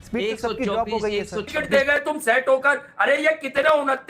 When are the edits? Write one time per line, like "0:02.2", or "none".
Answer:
0:01.5